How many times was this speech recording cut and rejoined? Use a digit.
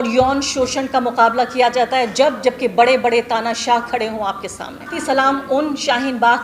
1